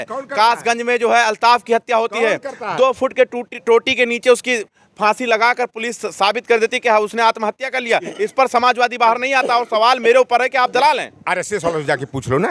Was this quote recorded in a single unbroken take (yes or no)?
yes